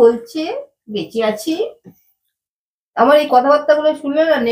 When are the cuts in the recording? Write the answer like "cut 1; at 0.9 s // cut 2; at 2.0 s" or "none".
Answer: none